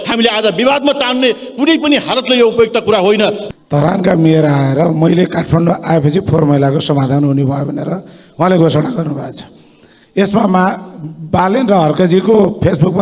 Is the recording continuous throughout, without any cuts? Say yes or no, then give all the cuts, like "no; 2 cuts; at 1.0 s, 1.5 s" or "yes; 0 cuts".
no; 1 cut; at 3.4 s